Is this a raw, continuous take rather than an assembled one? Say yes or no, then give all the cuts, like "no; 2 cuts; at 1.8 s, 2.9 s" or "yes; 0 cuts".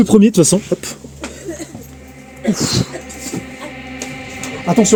yes; 0 cuts